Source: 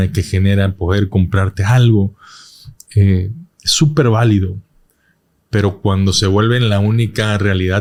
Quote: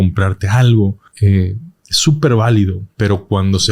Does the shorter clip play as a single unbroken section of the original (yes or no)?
no